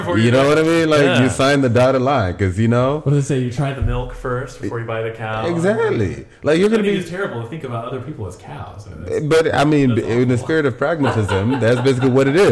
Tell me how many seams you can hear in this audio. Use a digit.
0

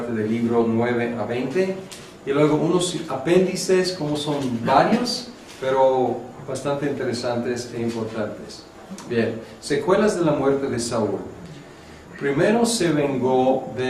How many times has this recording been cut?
0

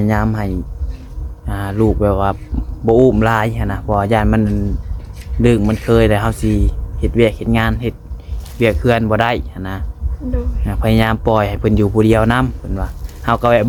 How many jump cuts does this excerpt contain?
0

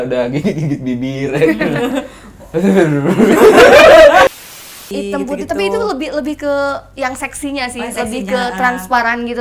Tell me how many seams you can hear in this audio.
1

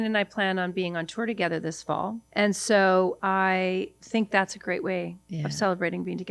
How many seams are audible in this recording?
2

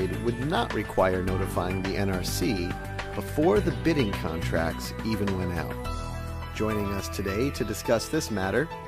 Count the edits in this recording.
1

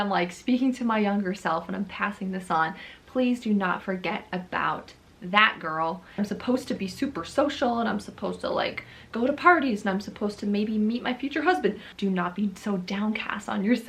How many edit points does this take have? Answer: 2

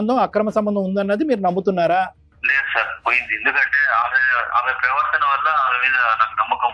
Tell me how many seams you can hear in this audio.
1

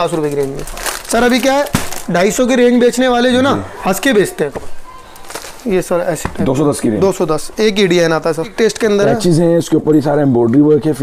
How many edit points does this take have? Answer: 2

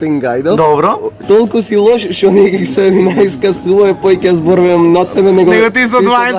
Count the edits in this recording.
0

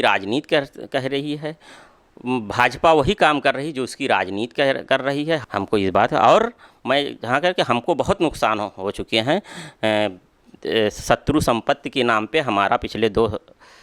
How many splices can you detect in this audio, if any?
1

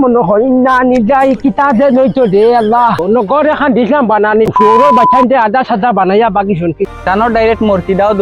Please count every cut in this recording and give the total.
2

